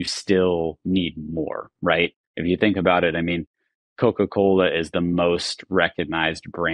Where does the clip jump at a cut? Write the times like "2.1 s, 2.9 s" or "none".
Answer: none